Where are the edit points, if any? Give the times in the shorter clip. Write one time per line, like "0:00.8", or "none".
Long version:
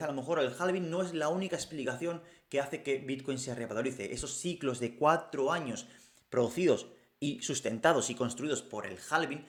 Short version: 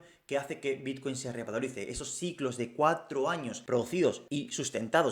0:03.5
0:04.2